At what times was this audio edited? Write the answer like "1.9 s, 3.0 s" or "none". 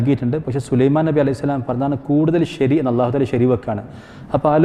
none